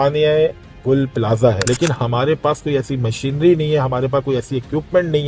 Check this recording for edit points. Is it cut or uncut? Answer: cut